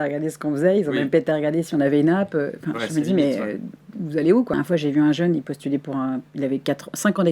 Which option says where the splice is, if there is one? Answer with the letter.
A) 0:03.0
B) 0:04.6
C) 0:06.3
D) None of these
B